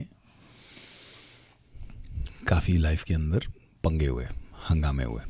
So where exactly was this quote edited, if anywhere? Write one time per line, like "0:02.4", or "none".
none